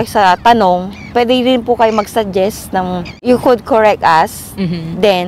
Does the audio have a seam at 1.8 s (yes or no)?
no